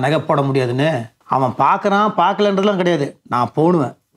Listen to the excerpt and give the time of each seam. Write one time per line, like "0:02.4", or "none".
0:01.1